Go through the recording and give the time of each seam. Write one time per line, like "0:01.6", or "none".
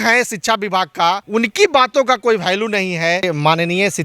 0:01.2
0:03.2